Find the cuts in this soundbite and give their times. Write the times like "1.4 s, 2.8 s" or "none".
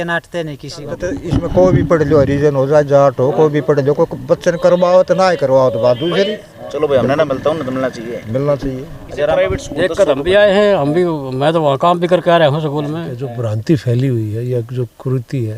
1.3 s, 6.5 s, 9.3 s, 13.4 s